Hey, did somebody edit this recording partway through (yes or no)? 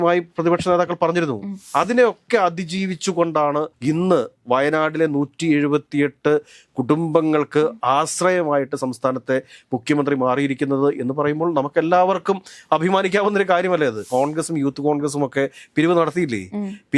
yes